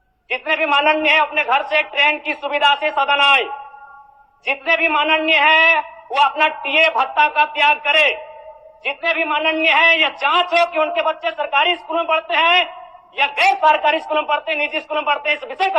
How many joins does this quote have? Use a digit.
0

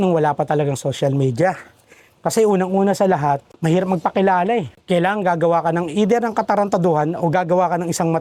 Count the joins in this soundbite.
0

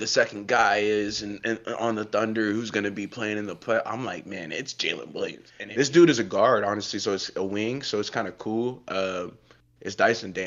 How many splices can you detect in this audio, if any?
1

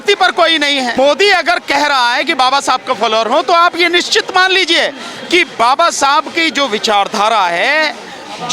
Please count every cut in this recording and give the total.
1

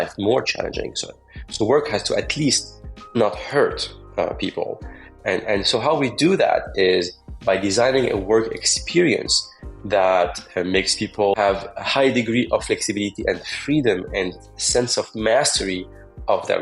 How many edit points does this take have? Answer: 1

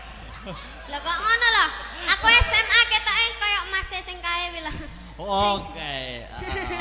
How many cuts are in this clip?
0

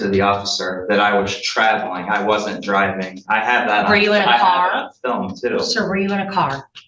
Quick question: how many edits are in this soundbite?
0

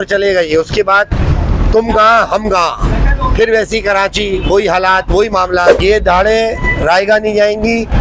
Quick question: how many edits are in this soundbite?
1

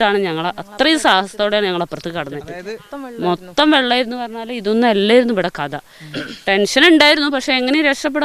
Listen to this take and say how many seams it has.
1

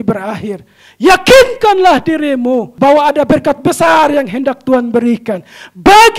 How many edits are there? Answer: 1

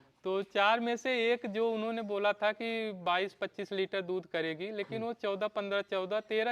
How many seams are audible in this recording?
0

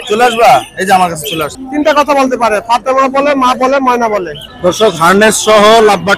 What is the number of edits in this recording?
2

